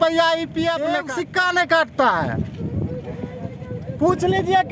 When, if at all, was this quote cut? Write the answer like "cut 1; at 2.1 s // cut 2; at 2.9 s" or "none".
cut 1; at 1.0 s